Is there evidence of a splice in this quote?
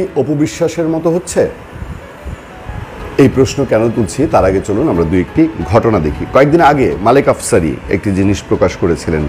no; 0 cuts

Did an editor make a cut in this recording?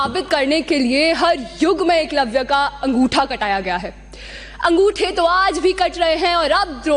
no; 0 cuts

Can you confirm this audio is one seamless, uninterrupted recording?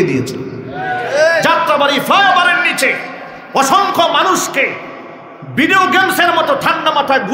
yes; 0 cuts

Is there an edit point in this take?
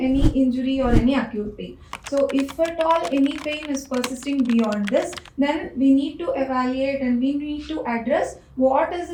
no; 0 cuts

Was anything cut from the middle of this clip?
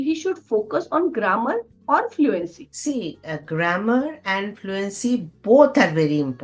no; 0 cuts

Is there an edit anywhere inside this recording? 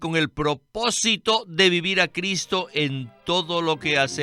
no; 0 cuts

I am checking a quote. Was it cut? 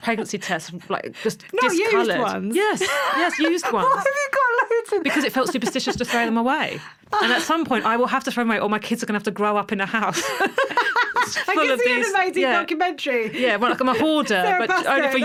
no; 0 cuts

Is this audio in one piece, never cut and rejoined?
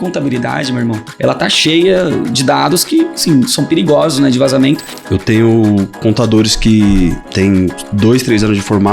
no; 3 cuts; at 1.1 s, 4.9 s, 7.5 s

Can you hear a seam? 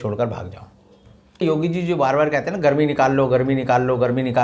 yes; 1 cut; at 1.4 s

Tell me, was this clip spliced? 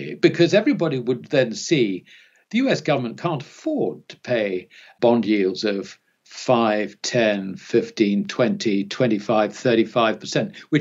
yes; 1 cut; at 4.9 s

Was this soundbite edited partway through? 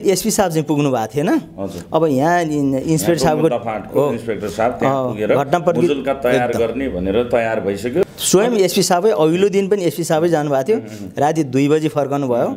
yes; 1 cut; at 8.0 s

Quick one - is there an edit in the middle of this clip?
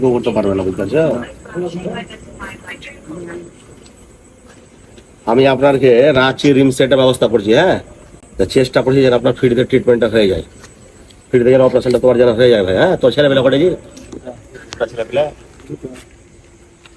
no; 0 cuts

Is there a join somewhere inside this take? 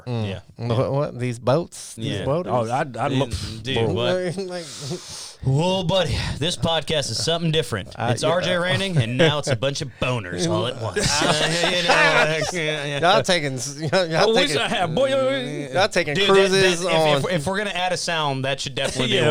no; 0 cuts

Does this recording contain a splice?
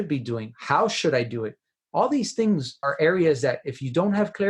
yes; 1 cut; at 2.7 s

